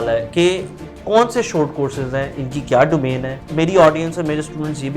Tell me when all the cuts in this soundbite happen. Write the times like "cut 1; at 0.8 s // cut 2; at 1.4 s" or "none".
cut 1; at 1.0 s // cut 2; at 3.4 s